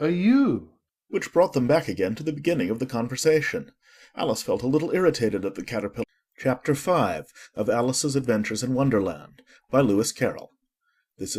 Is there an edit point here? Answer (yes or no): no